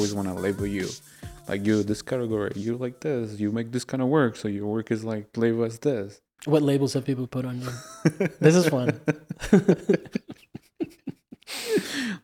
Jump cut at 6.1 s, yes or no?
yes